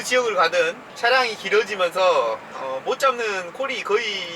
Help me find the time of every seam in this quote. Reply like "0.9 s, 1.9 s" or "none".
1.0 s